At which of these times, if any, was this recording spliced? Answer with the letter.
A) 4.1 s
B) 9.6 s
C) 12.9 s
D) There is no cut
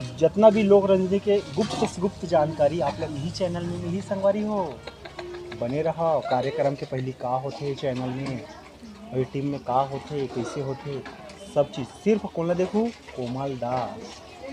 D